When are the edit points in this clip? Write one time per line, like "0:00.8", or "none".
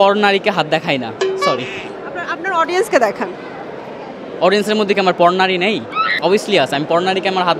none

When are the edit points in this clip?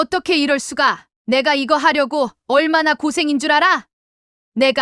0:03.9

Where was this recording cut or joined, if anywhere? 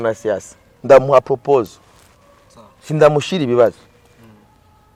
none

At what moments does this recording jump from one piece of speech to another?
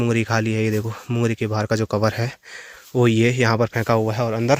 none

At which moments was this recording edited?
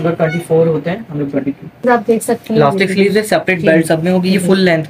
0:01.8

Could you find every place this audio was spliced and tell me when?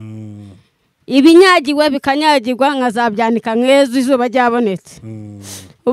none

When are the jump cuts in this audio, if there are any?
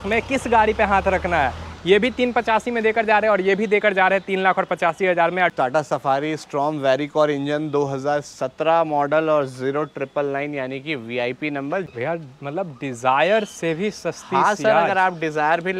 0:05.5
0:11.9

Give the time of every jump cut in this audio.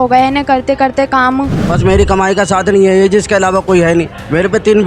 0:01.6

